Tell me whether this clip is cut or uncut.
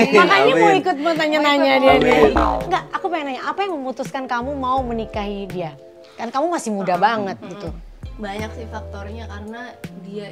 cut